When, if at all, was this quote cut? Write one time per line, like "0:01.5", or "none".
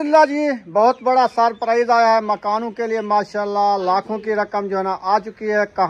none